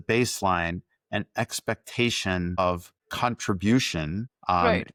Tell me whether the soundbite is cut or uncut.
uncut